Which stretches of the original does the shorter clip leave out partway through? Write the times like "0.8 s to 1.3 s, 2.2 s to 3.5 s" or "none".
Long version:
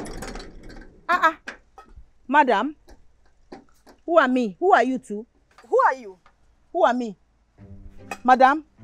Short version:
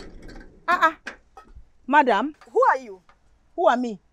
2.8 s to 5.6 s